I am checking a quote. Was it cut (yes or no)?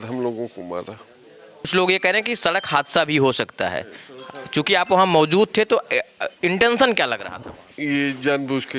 yes